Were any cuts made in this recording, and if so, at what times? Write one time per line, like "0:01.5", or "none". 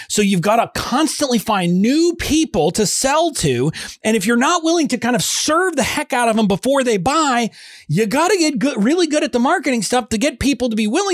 none